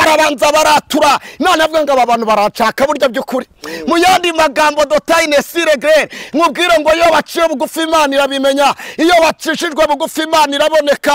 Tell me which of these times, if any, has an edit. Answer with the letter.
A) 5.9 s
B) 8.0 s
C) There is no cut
C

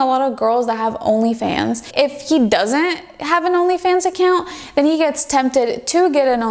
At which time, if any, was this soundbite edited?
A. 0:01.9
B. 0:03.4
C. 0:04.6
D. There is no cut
A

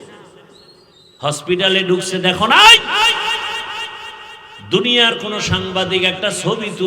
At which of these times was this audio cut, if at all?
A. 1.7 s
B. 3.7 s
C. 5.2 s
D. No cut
D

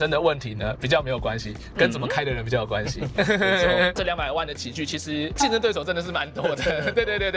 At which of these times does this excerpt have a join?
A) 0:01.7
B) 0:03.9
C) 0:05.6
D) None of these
B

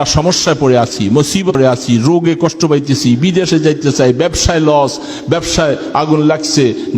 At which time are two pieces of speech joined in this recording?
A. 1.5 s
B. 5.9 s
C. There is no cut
A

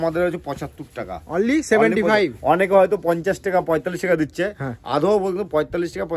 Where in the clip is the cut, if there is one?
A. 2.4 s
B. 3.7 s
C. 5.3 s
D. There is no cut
D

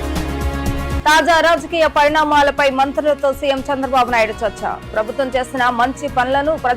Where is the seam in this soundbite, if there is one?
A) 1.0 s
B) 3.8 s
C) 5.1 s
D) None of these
A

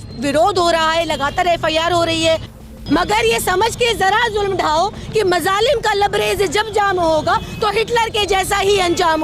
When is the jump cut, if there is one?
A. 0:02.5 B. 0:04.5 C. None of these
A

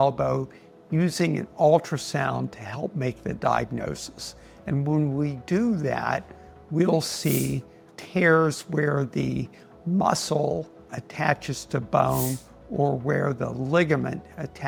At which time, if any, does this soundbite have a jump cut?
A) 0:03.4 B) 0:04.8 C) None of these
C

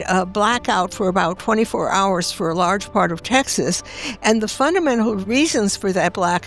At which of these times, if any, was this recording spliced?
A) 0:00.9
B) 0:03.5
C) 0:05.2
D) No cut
C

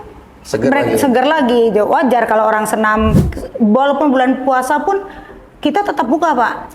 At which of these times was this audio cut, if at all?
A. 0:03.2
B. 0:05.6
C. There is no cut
A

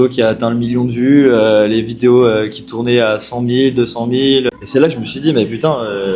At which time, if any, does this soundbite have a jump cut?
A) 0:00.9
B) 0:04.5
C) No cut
B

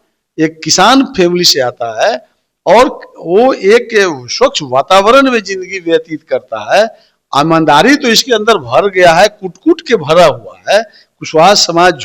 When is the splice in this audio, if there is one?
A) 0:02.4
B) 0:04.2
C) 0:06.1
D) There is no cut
D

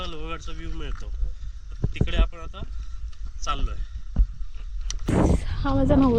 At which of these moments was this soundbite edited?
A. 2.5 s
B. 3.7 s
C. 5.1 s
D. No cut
C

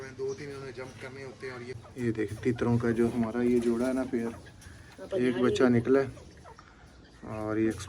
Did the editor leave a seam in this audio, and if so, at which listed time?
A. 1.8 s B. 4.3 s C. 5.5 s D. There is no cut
A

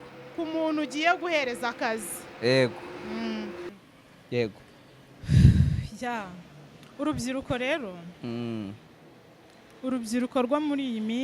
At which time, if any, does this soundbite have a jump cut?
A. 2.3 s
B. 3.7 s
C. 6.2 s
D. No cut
B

